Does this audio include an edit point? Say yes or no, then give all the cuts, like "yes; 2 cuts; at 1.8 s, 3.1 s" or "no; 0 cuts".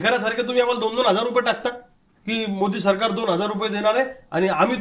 no; 0 cuts